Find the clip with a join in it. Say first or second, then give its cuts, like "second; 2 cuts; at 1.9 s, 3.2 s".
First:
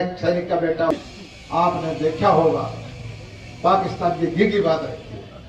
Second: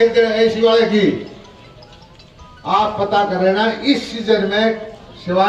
first; 1 cut; at 0.9 s